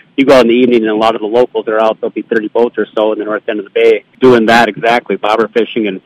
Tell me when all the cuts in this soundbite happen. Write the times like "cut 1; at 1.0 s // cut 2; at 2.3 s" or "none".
cut 1; at 4.1 s